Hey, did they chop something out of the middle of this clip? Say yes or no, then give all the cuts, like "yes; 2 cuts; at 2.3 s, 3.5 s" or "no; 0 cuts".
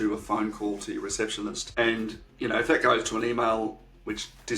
yes; 1 cut; at 1.6 s